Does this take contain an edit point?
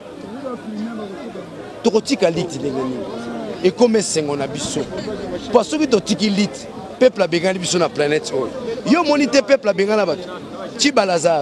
no; 0 cuts

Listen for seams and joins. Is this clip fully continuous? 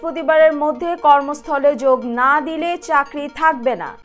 yes; 0 cuts

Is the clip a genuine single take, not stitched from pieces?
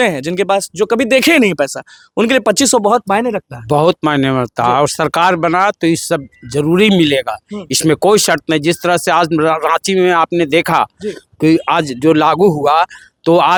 yes; 0 cuts

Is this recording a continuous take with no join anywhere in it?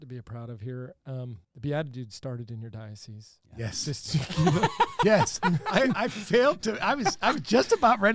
no; 1 cut; at 1.4 s

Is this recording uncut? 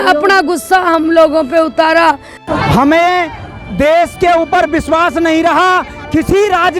no; 1 cut; at 2.4 s

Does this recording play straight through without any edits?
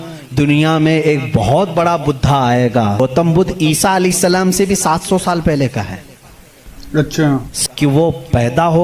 no; 2 cuts; at 3.0 s, 7.5 s

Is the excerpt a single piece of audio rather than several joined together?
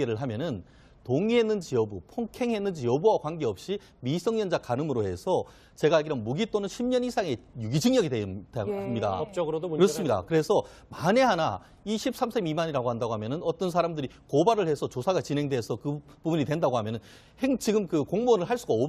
no; 1 cut; at 2.8 s

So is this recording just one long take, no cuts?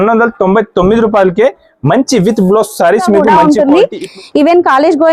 no; 1 cut; at 3.3 s

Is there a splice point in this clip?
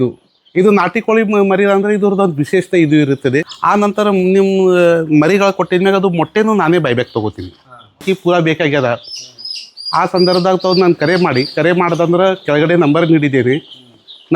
yes; 2 cuts; at 3.5 s, 8.0 s

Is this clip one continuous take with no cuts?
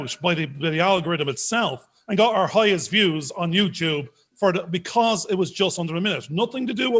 yes; 0 cuts

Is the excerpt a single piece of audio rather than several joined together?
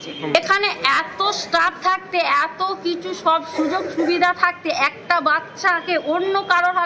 yes; 0 cuts

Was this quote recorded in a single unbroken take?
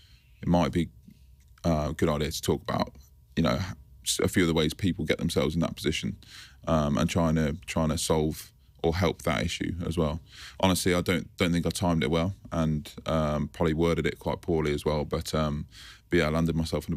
yes; 0 cuts

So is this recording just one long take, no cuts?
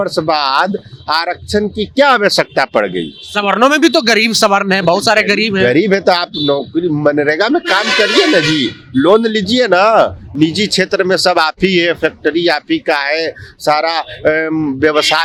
yes; 0 cuts

